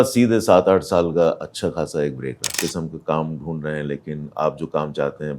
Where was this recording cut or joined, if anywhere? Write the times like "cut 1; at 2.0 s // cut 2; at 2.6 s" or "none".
cut 1; at 2.6 s